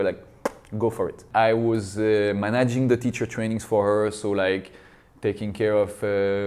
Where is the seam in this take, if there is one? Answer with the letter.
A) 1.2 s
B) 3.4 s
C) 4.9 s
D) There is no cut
A